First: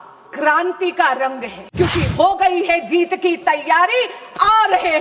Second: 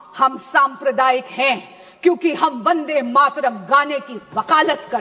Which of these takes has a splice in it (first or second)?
first